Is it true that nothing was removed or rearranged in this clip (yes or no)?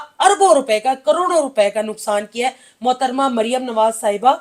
yes